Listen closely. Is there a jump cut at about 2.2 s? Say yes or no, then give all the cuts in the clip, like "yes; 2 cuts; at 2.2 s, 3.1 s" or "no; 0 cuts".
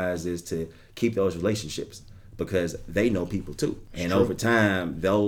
no; 1 cut; at 3.9 s